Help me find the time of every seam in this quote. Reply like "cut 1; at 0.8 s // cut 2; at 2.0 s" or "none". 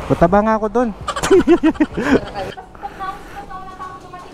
cut 1; at 2.5 s